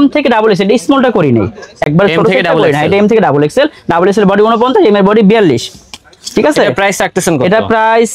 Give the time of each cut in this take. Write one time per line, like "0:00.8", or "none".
none